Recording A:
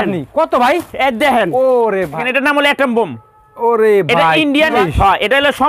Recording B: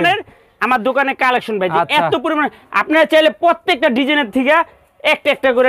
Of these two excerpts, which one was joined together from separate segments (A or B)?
A